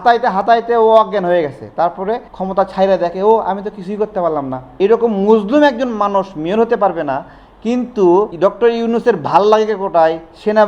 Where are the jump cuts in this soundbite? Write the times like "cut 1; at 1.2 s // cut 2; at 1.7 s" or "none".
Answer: cut 1; at 2.3 s // cut 2; at 4.6 s // cut 3; at 8.3 s